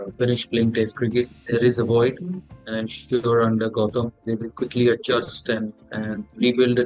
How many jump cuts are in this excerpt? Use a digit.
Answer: 2